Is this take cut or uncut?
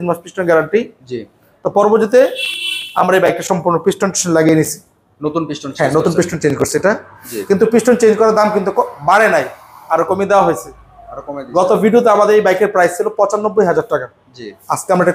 uncut